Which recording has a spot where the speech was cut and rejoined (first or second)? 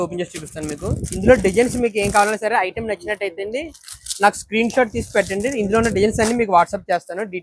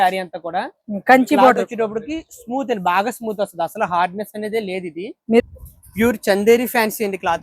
second